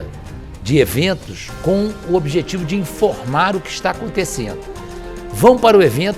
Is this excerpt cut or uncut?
uncut